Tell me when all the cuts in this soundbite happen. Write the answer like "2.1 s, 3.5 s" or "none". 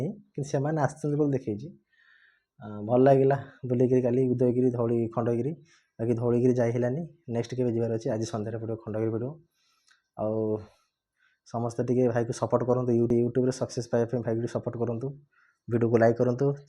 13.1 s